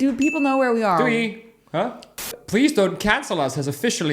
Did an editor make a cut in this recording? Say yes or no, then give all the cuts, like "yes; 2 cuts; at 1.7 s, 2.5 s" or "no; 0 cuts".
yes; 1 cut; at 2.3 s